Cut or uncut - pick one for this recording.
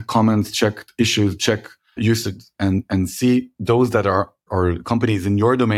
cut